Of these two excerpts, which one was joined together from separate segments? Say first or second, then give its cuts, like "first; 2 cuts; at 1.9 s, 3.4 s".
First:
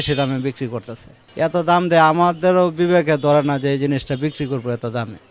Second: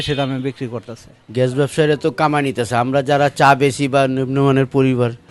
second; 1 cut; at 1.2 s